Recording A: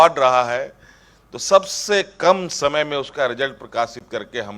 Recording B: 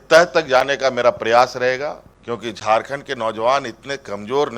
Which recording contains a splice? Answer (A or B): B